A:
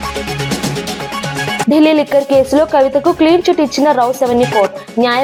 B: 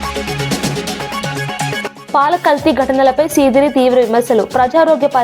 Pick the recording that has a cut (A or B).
B